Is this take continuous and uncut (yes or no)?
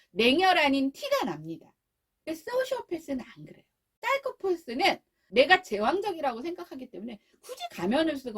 no